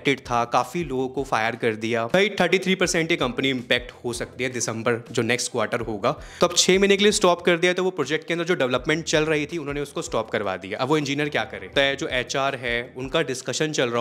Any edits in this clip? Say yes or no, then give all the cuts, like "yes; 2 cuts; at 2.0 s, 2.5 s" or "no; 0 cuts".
yes; 3 cuts; at 2.1 s, 6.3 s, 11.7 s